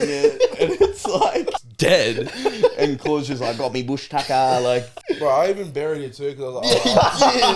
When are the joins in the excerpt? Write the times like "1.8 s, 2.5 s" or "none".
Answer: 1.6 s, 4.9 s